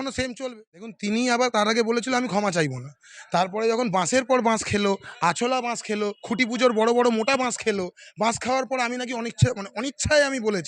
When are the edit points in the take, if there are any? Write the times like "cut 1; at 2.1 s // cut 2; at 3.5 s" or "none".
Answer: cut 1; at 0.9 s